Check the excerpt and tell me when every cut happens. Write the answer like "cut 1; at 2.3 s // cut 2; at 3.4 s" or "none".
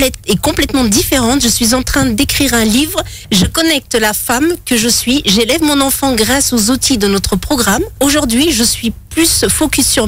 cut 1; at 3.1 s // cut 2; at 7.9 s